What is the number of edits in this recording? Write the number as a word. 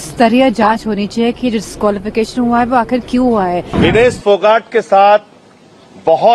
one